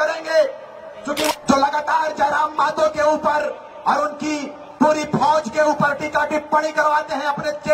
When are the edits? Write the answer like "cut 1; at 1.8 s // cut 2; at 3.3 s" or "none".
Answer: cut 1; at 1.3 s